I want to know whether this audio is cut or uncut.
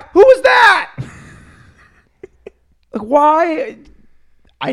uncut